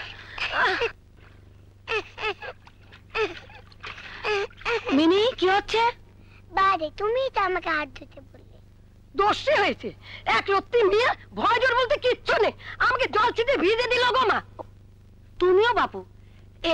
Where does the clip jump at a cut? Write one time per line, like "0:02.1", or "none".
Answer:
0:01.1

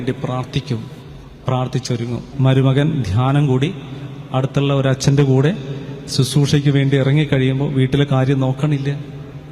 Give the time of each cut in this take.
0:02.2

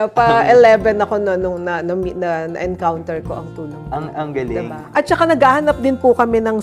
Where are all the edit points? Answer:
0:04.8

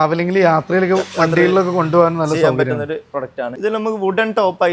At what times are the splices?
0:03.5

